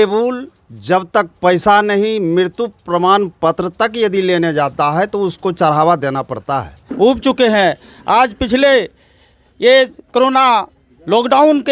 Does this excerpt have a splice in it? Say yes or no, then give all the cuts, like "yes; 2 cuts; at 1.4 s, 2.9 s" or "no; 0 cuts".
yes; 1 cut; at 6.9 s